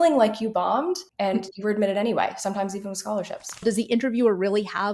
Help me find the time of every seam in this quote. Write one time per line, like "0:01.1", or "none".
0:01.0
0:03.6